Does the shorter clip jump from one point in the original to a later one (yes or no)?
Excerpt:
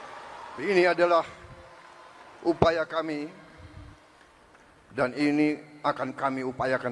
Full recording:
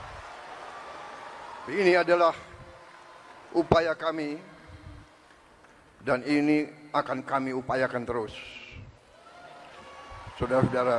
no